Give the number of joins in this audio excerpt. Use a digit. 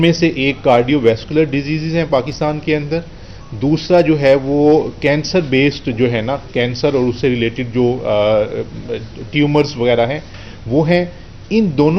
0